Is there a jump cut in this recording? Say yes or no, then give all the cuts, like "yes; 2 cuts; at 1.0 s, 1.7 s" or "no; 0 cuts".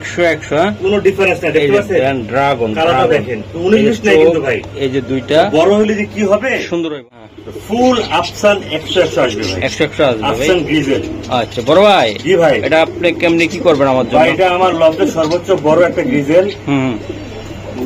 yes; 1 cut; at 7.2 s